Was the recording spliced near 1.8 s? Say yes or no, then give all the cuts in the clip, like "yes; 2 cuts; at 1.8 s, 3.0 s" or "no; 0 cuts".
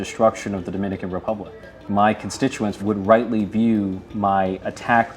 yes; 3 cuts; at 1.8 s, 2.8 s, 4.0 s